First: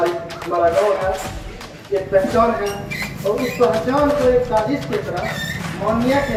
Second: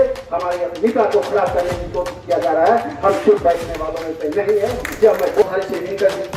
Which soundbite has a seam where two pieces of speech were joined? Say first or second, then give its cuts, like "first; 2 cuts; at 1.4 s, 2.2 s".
second; 1 cut; at 5.4 s